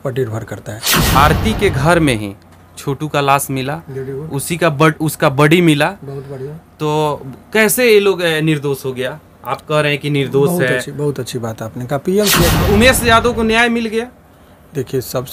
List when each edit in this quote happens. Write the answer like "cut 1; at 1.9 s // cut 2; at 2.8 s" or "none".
cut 1; at 1.0 s // cut 2; at 12.6 s